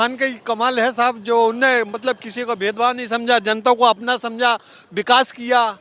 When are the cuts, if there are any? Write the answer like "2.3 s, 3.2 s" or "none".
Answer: none